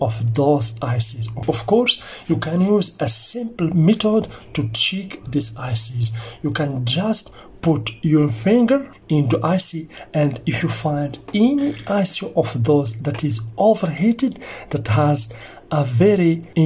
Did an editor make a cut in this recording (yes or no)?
yes